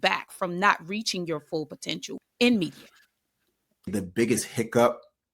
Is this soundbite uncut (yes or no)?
yes